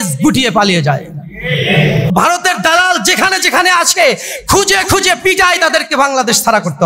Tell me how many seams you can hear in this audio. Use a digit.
1